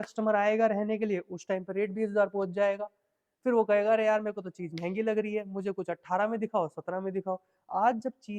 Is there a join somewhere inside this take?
no; 0 cuts

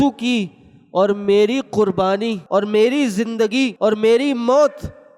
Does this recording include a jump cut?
yes; 2 cuts; at 2.4 s, 3.7 s

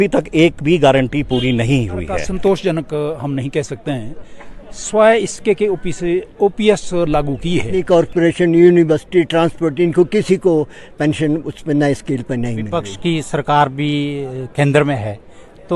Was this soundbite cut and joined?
yes; 3 cuts; at 2.3 s, 7.7 s, 12.8 s

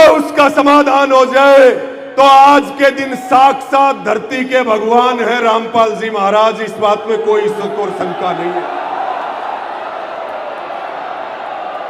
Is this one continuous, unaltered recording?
yes; 0 cuts

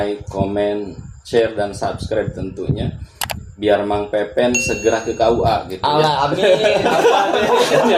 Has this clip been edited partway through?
no; 0 cuts

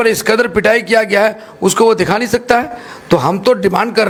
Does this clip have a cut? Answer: no; 0 cuts

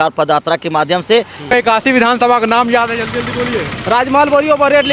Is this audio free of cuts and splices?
no; 1 cut; at 1.4 s

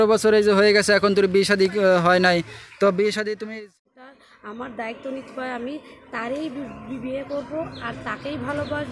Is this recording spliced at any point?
yes; 1 cut; at 3.5 s

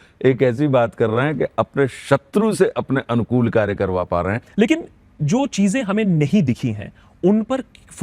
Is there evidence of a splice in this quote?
yes; 1 cut; at 4.4 s

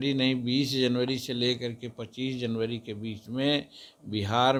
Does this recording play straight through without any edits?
yes; 0 cuts

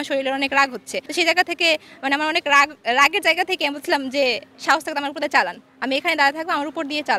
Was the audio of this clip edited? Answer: no; 0 cuts

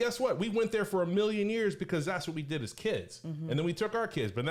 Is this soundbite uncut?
yes; 0 cuts

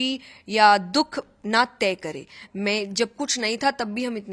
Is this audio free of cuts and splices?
yes; 0 cuts

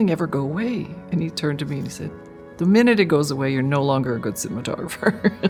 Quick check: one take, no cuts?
yes; 0 cuts

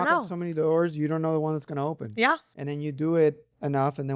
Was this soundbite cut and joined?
no; 0 cuts

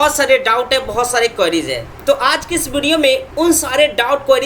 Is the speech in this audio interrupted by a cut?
yes; 2 cuts; at 1.8 s, 3.3 s

